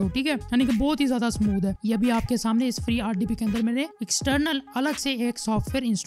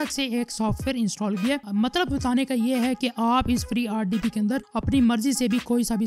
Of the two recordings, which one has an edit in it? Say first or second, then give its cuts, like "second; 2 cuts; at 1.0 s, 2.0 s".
first; 1 cut; at 1.8 s